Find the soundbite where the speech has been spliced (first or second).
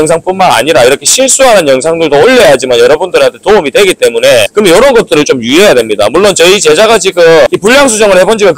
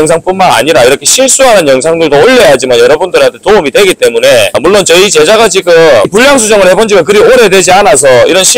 second